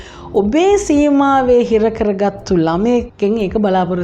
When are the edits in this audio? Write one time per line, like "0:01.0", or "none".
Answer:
0:03.1